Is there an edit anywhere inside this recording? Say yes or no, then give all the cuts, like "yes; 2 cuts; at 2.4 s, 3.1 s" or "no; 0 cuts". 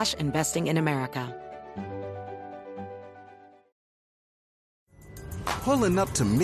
yes; 1 cut; at 1.3 s